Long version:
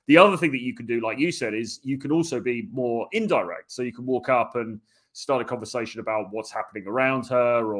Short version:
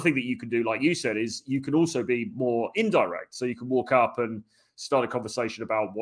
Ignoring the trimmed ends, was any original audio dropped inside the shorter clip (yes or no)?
no